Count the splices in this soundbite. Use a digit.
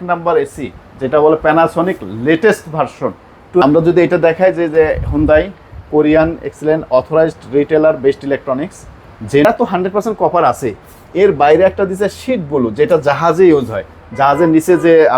2